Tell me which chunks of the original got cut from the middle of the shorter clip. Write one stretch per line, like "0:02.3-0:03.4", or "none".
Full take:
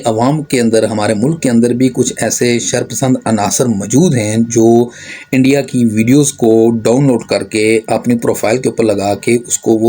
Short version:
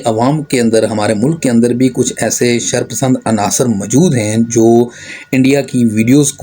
none